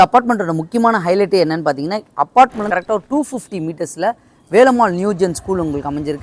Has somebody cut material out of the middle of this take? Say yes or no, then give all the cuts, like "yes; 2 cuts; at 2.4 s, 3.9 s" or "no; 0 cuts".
yes; 1 cut; at 2.8 s